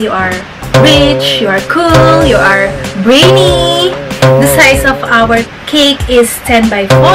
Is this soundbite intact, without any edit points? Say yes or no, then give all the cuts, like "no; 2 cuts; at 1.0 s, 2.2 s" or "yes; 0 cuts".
no; 1 cut; at 4.1 s